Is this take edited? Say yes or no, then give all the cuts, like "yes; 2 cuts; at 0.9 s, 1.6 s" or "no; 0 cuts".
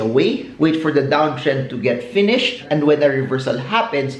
no; 0 cuts